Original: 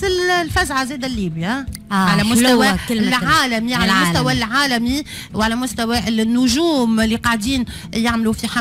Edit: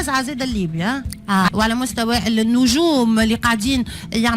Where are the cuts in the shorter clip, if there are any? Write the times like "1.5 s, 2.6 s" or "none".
1.5 s